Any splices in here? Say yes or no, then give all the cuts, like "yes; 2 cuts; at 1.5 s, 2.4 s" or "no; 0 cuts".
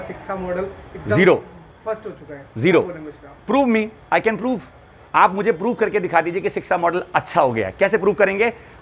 no; 0 cuts